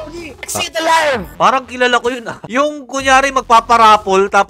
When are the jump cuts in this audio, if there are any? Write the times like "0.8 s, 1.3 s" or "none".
1.3 s